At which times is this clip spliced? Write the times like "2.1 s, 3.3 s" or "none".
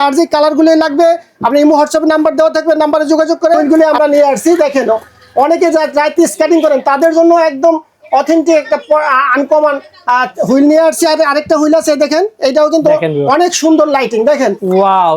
3.6 s